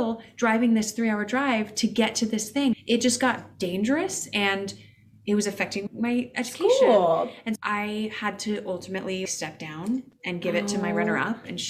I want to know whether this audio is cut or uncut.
cut